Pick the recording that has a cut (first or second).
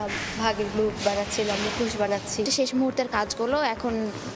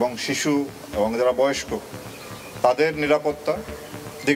first